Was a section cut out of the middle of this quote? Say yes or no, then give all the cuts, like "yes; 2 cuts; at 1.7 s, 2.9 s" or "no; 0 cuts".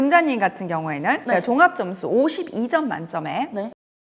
no; 0 cuts